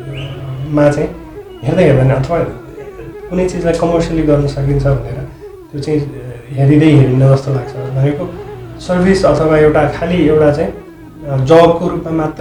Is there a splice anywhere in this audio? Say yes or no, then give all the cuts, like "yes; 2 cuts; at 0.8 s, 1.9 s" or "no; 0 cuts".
no; 0 cuts